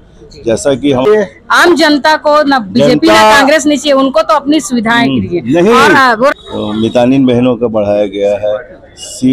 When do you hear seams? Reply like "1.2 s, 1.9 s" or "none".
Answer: 1.1 s, 6.3 s